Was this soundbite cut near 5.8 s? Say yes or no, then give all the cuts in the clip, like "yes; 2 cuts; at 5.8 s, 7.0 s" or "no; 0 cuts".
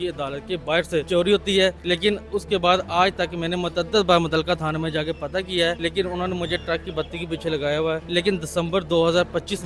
yes; 4 cuts; at 1.1 s, 1.8 s, 5.8 s, 8.0 s